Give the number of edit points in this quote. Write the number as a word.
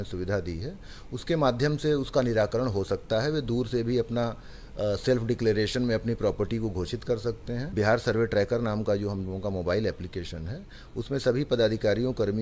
one